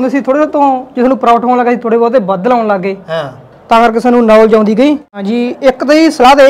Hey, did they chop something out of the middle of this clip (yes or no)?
yes